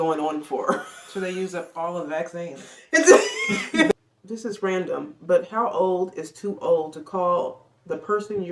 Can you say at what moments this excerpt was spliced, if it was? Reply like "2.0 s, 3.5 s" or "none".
3.9 s